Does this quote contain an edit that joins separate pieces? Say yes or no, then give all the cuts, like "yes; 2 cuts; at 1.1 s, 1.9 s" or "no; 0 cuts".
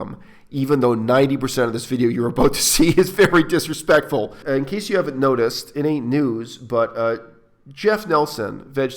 yes; 1 cut; at 4.4 s